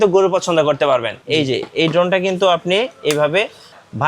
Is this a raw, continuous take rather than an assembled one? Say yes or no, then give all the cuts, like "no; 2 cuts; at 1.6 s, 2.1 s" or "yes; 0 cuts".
no; 1 cut; at 1.2 s